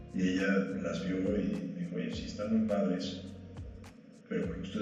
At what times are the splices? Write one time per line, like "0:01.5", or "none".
none